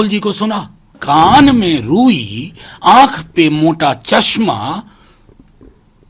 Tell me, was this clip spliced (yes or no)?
yes